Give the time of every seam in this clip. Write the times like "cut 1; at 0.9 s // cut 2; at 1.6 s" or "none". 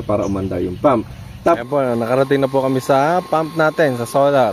cut 1; at 1.6 s